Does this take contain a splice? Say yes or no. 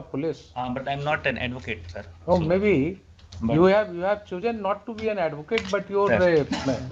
no